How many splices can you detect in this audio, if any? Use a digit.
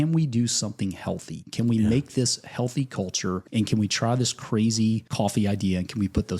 2